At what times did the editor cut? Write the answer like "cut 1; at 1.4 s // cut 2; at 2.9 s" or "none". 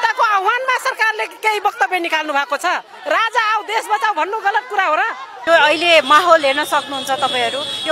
cut 1; at 5.3 s